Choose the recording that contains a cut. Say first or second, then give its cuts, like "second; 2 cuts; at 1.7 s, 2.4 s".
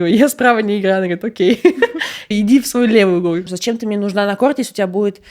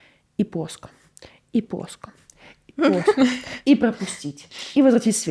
first; 2 cuts; at 2.3 s, 3.5 s